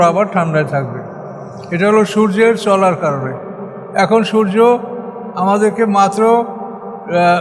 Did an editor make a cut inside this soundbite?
no; 0 cuts

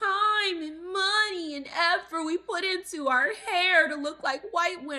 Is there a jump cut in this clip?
no; 0 cuts

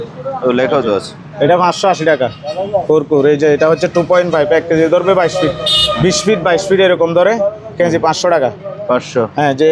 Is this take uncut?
yes; 0 cuts

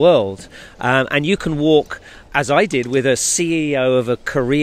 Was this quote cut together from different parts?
no; 0 cuts

